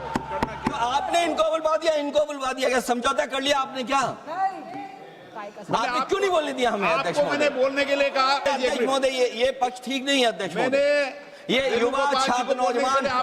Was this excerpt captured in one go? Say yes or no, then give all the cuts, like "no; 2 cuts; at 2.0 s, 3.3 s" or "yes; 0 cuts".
no; 1 cut; at 8.4 s